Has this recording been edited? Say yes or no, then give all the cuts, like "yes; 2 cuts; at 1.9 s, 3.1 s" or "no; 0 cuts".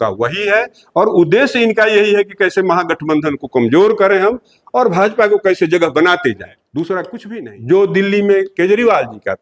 yes; 1 cut; at 7.2 s